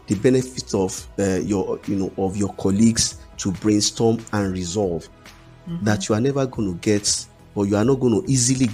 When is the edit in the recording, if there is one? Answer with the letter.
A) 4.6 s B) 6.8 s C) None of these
C